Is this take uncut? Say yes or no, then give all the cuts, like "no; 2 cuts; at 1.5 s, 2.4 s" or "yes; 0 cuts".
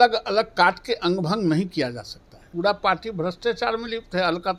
no; 1 cut; at 2.4 s